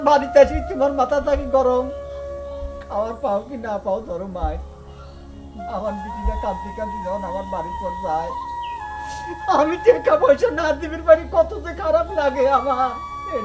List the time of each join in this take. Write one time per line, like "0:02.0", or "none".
none

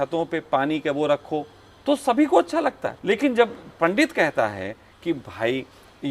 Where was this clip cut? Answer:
0:02.9

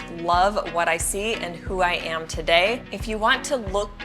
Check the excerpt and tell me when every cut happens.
0:02.8

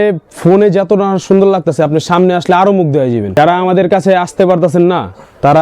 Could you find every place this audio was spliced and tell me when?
0:03.4

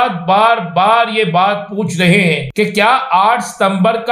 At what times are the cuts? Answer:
0:02.5

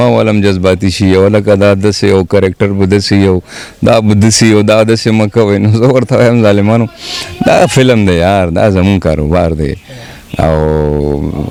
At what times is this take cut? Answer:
none

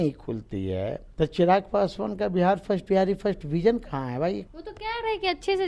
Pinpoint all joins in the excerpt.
0:01.0
0:04.5

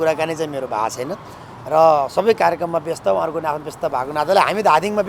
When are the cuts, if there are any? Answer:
none

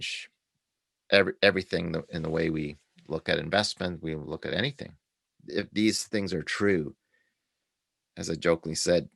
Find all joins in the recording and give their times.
0:05.4

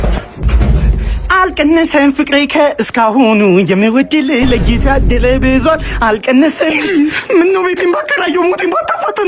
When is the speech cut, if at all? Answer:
none

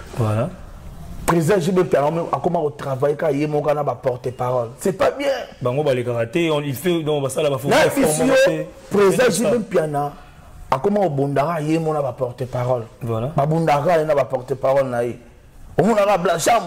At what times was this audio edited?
none

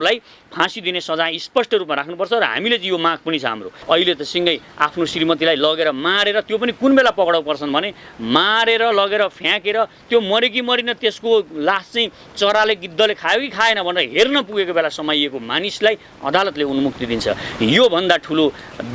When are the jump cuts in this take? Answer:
0:03.8

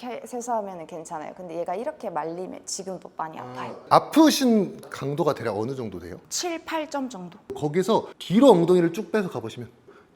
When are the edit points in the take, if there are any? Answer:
0:03.8
0:04.9
0:06.2
0:07.6

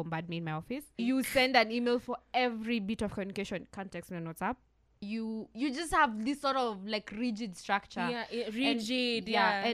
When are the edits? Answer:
0:00.9
0:05.0

